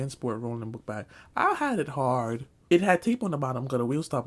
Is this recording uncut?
no; 1 cut; at 2.5 s

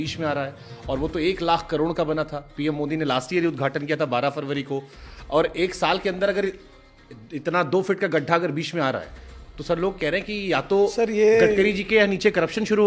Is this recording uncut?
yes; 0 cuts

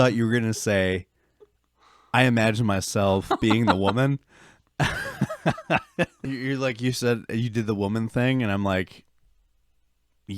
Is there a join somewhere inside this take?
yes; 1 cut; at 6.2 s

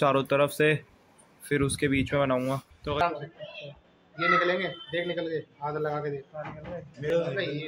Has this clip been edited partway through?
yes; 2 cuts; at 3.0 s, 6.6 s

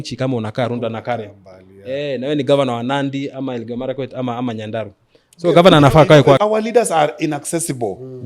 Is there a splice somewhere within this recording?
yes; 1 cut; at 6.4 s

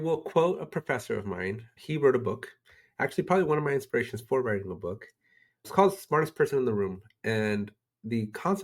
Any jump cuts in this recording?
yes; 2 cuts; at 1.7 s, 5.7 s

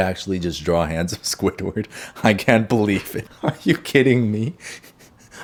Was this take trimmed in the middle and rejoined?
no; 0 cuts

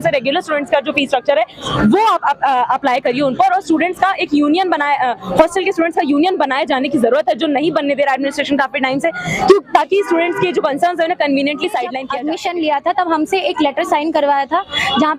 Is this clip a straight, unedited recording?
no; 1 cut; at 12.1 s

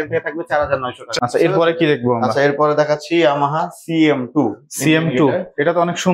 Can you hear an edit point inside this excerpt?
yes; 1 cut; at 1.0 s

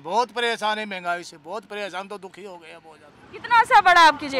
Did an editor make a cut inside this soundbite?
yes; 1 cut; at 3.2 s

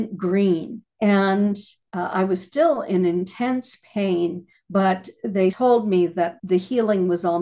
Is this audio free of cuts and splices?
no; 2 cuts; at 5.6 s, 6.4 s

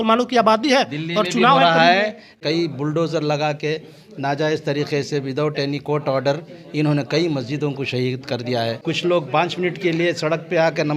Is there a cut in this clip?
yes; 2 cuts; at 2.3 s, 8.8 s

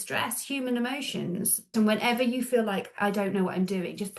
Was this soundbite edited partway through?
yes; 2 cuts; at 1.7 s, 2.9 s

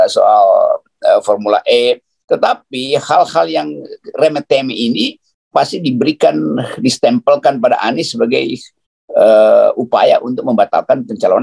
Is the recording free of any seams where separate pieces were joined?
yes; 0 cuts

